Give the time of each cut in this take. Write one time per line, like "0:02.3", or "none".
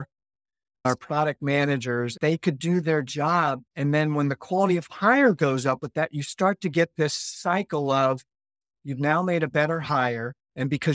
0:00.8
0:02.1
0:03.6